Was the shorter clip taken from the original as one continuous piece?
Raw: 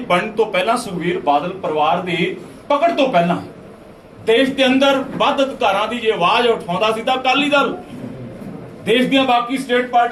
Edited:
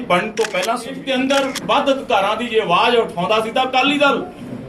no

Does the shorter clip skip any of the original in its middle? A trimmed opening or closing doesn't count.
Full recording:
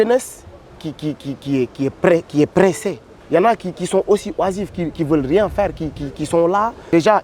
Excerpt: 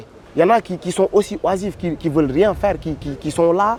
no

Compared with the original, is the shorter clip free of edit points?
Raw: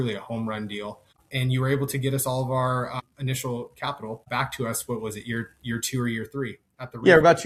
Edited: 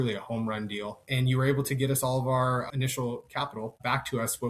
no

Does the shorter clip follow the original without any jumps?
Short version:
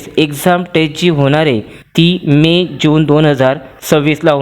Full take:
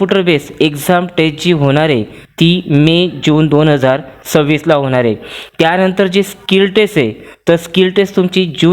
yes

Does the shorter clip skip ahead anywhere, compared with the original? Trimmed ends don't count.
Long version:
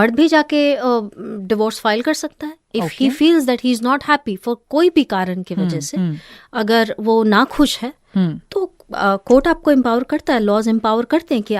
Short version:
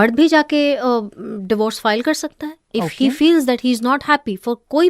no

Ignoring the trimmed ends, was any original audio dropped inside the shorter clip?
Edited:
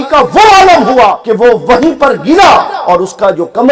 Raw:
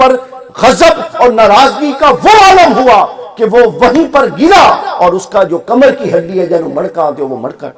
yes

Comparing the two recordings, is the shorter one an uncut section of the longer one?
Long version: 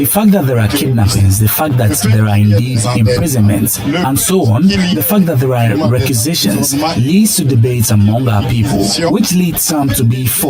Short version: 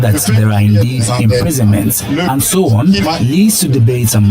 no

